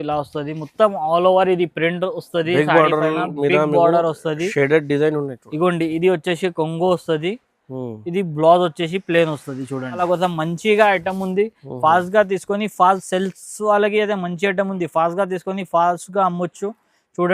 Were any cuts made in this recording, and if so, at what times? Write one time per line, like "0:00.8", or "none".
0:10.0